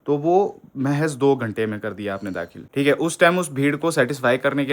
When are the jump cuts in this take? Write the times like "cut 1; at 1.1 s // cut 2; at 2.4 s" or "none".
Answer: cut 1; at 2.6 s